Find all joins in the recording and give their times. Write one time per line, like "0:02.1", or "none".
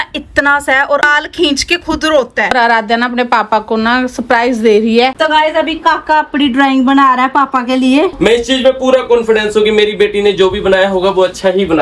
0:01.1
0:02.5
0:05.1
0:08.1